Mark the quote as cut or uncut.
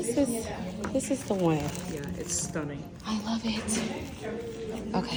uncut